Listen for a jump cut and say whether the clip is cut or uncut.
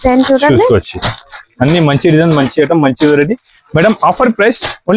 uncut